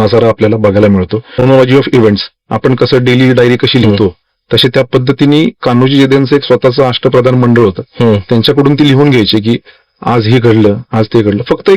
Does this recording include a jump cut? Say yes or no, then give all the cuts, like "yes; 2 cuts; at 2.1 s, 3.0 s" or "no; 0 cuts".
yes; 1 cut; at 1.4 s